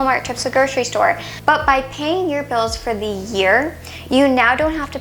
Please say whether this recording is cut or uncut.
cut